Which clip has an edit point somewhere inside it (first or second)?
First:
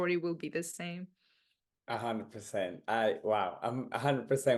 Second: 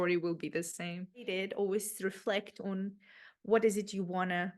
second